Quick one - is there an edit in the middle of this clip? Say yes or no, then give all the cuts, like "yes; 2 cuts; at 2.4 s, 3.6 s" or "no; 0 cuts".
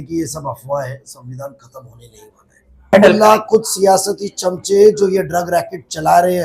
yes; 1 cut; at 2.9 s